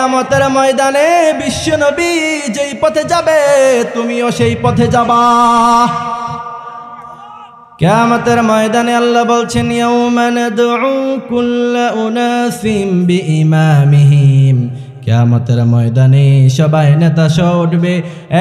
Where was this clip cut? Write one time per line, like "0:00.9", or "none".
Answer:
0:07.6